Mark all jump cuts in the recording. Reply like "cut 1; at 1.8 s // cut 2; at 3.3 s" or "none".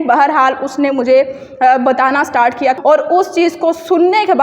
cut 1; at 2.8 s